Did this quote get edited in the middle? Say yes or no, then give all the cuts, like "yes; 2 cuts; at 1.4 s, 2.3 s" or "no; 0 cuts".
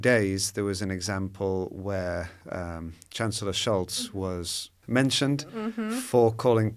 yes; 1 cut; at 4.8 s